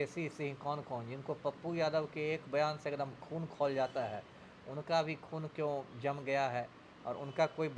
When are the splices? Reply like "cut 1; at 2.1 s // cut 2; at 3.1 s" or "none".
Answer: none